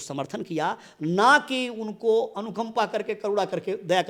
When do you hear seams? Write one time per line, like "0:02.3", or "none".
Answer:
none